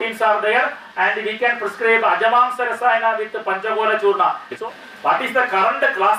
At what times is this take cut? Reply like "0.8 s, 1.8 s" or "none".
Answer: 4.5 s